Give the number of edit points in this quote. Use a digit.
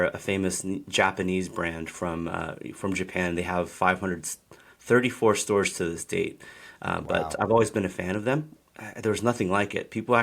1